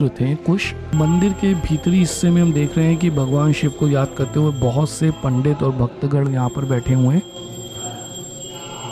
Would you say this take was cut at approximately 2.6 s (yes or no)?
no